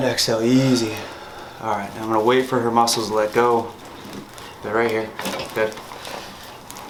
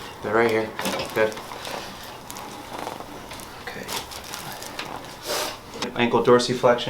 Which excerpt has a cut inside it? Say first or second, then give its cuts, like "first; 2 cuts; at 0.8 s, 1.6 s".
second; 1 cut; at 5.9 s